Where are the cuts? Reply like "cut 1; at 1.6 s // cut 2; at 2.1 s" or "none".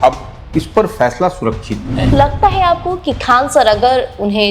cut 1; at 2.1 s